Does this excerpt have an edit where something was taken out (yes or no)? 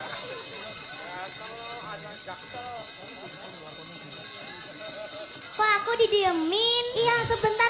no